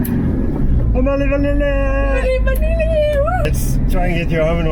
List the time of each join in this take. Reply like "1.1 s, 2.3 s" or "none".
3.4 s